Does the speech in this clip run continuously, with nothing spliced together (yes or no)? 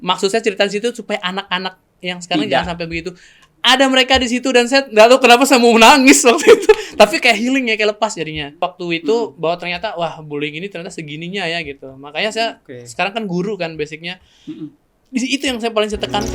no